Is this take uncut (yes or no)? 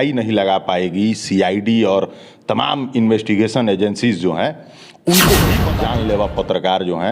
no